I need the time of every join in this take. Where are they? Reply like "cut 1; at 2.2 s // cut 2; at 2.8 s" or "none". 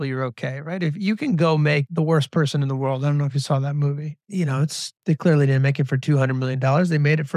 cut 1; at 1.9 s // cut 2; at 4.9 s